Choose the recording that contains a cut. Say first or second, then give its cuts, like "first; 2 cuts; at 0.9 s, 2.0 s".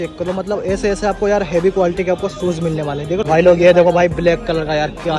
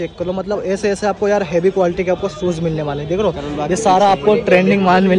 first; 1 cut; at 3.2 s